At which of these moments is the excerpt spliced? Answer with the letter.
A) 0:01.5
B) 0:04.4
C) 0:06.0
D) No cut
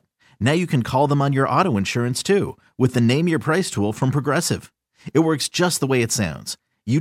D